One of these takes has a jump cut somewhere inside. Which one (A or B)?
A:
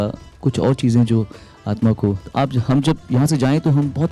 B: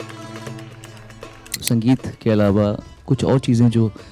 B